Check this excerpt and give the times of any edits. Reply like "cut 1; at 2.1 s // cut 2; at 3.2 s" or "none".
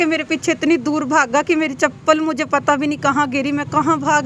none